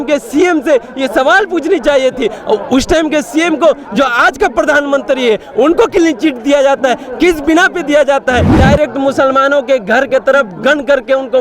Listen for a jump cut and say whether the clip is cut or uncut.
cut